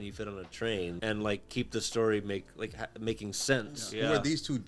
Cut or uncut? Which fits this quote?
cut